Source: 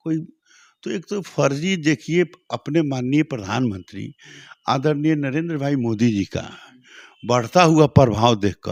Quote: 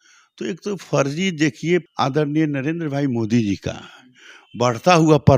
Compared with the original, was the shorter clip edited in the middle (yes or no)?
yes